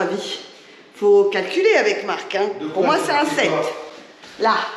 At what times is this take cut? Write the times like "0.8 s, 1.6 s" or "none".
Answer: none